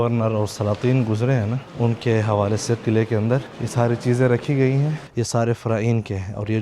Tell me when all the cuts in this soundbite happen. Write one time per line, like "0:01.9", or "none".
0:01.6
0:03.6
0:05.0